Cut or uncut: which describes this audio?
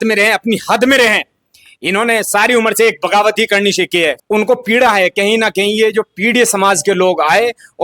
cut